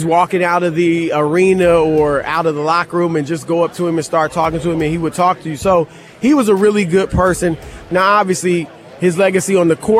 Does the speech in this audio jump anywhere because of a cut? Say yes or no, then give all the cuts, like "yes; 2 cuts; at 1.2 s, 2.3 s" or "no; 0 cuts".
yes; 1 cut; at 7.8 s